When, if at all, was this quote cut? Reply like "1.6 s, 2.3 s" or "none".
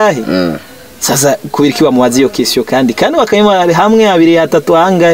none